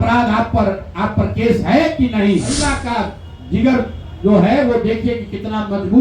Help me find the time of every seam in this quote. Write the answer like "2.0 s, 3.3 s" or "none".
2.7 s